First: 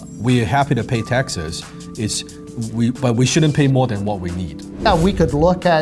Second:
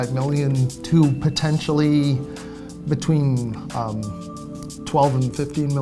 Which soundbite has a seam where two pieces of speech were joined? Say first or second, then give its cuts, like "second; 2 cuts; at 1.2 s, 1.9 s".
first; 1 cut; at 4.8 s